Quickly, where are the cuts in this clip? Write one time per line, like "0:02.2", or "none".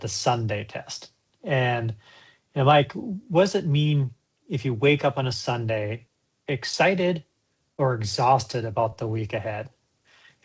none